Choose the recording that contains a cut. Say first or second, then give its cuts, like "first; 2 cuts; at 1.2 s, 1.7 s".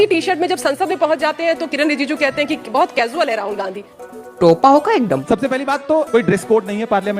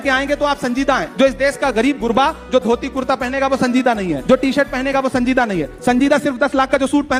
first; 1 cut; at 5.2 s